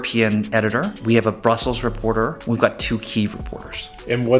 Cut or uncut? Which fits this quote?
cut